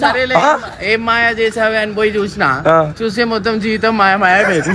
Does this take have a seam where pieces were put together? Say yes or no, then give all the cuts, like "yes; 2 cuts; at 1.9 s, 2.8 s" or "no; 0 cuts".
no; 0 cuts